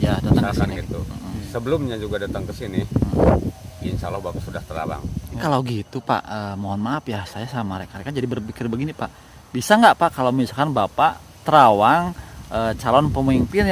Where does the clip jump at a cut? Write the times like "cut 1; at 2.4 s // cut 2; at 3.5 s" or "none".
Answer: cut 1; at 5.4 s